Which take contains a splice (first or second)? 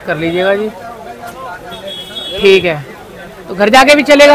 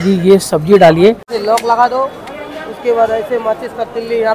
second